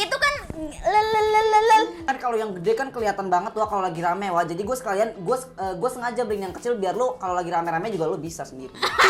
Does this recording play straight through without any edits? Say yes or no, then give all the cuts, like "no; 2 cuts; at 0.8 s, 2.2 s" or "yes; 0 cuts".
no; 1 cut; at 2.0 s